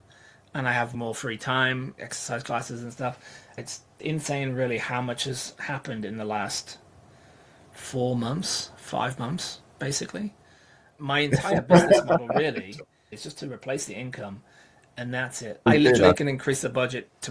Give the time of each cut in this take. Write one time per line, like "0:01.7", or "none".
0:00.9
0:02.0
0:03.5
0:10.9
0:13.1
0:15.7